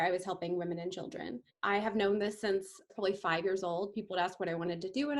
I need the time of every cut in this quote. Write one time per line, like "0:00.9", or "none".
0:01.5
0:02.9